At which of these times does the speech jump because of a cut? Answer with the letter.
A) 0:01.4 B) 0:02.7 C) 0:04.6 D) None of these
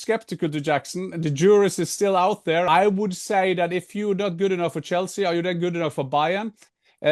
B